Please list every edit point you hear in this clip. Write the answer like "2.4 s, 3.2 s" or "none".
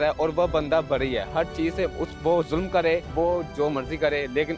3.1 s